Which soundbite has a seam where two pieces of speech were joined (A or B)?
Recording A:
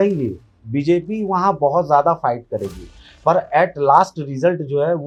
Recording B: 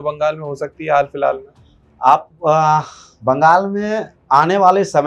B